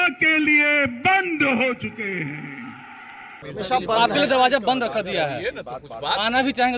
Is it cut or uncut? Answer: uncut